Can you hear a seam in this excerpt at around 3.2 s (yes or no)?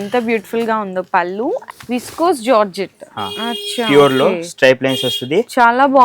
no